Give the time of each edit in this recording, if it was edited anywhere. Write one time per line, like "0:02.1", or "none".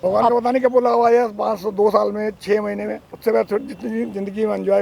0:03.0